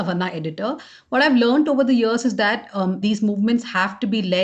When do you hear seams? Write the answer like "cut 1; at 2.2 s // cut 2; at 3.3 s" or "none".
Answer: cut 1; at 3.0 s